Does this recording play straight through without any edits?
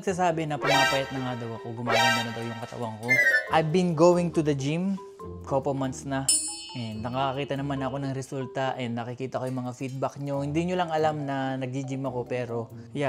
yes; 0 cuts

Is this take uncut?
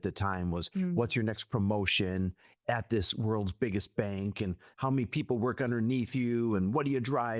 yes; 0 cuts

